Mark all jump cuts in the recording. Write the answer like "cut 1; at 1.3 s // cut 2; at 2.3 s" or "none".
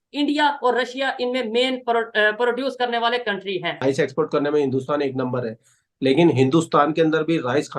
cut 1; at 3.7 s

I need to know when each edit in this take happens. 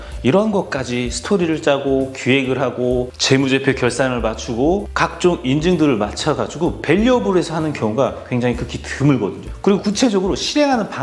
none

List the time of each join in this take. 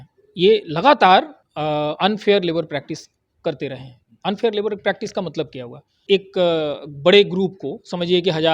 cut 1; at 1.4 s // cut 2; at 6.0 s

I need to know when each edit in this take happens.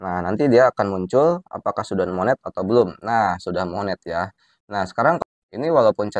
cut 1; at 5.2 s

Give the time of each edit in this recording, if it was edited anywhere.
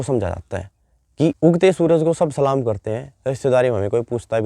cut 1; at 1.4 s

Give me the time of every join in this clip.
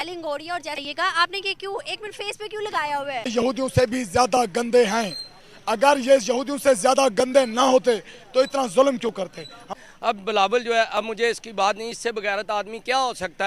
cut 1; at 0.8 s // cut 2; at 3.3 s // cut 3; at 9.6 s

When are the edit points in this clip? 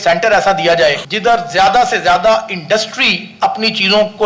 cut 1; at 1.1 s

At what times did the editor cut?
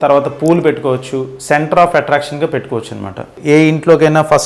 cut 1; at 3.4 s

